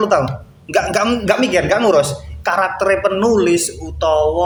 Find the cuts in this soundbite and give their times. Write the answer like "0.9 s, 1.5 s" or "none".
none